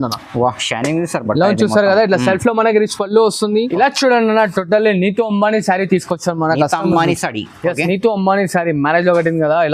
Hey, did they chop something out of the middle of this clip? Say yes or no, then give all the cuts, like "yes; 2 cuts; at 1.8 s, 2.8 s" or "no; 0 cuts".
yes; 1 cut; at 3.7 s